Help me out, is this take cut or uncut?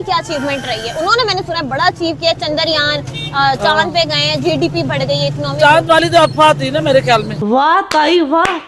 uncut